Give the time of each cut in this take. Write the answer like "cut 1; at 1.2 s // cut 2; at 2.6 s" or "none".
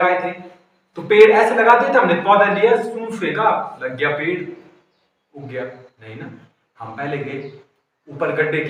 none